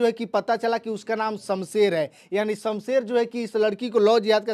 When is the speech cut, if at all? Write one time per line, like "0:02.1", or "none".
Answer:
none